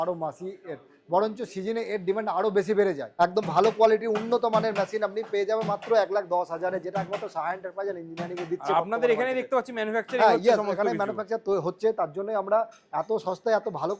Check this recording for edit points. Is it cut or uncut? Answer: cut